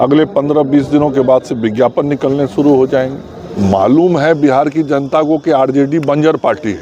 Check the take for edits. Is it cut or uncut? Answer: cut